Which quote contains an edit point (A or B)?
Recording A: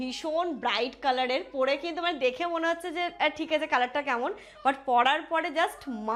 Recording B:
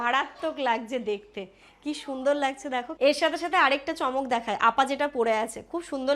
B